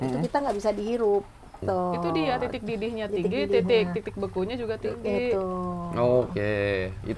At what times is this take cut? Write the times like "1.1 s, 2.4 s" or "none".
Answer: 1.6 s